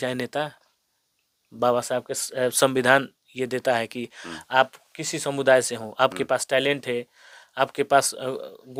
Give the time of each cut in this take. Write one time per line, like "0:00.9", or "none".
none